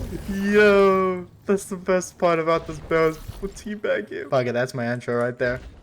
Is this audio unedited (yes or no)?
no